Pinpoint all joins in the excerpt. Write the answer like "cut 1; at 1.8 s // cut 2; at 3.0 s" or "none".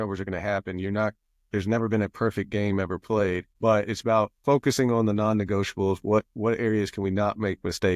cut 1; at 4.4 s

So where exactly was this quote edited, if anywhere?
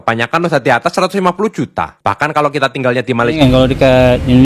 cut 1; at 3.4 s

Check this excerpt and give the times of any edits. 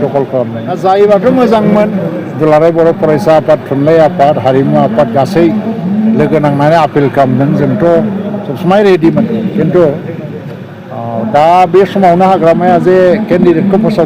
cut 1; at 0.9 s

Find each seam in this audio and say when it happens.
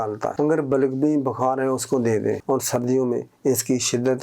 cut 1; at 2.4 s

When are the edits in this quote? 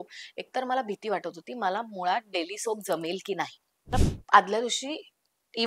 cut 1; at 3.9 s

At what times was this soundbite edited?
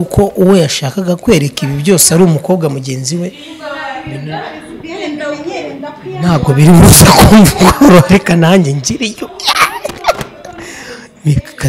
none

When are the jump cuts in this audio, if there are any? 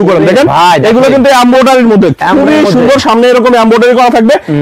none

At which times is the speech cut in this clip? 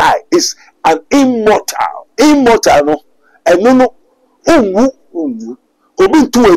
cut 1; at 2.0 s

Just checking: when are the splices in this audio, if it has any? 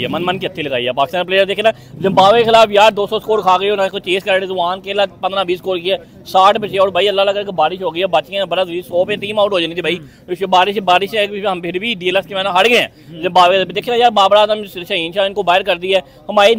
none

